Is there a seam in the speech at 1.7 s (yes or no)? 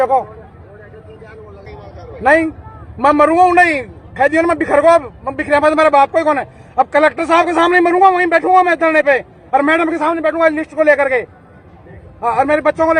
yes